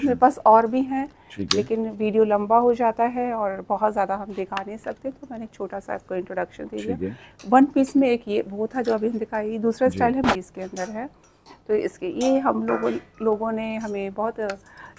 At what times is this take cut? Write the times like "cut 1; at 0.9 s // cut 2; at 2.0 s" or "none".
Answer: none